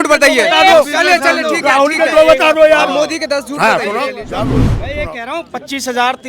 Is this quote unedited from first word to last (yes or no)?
no